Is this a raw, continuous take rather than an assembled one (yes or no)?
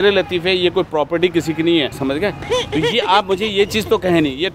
no